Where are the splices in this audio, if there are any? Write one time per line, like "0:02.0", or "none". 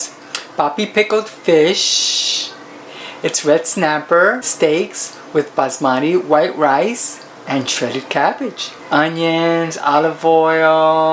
0:04.5
0:08.7